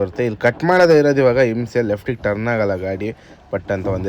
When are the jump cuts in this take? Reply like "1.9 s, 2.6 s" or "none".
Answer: none